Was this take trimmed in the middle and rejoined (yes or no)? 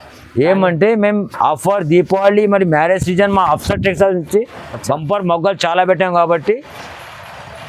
no